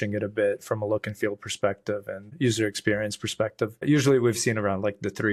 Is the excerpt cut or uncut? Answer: uncut